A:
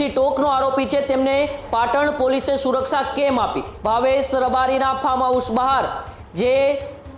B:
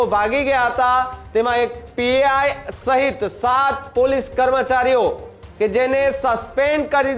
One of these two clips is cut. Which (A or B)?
A